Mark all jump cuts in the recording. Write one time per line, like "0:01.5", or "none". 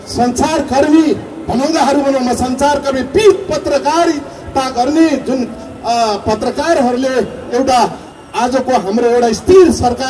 none